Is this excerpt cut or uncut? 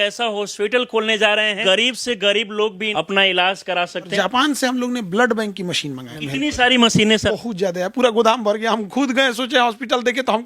cut